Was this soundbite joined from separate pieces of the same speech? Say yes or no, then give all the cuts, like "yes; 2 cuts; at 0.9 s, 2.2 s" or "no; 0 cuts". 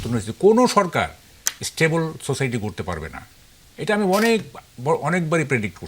no; 0 cuts